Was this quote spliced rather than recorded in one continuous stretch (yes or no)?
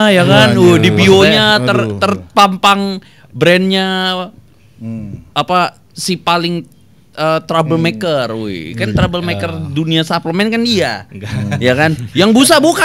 no